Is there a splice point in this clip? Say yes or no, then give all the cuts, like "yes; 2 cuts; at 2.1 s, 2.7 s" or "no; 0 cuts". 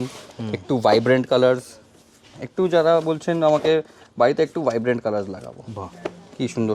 no; 0 cuts